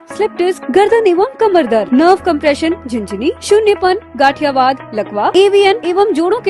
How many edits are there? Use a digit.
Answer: 0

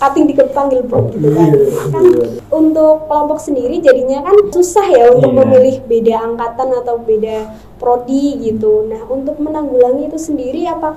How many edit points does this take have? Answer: 2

